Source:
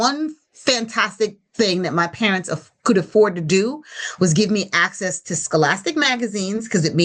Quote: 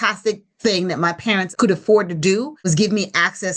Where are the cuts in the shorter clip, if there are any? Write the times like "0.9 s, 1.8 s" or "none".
1.5 s, 2.7 s